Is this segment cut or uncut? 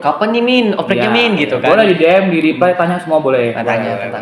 uncut